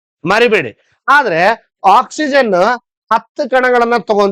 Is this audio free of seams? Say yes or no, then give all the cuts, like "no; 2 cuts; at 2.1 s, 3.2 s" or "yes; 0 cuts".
yes; 0 cuts